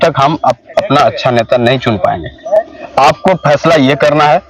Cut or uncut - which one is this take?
uncut